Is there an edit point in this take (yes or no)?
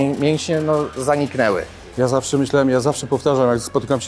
yes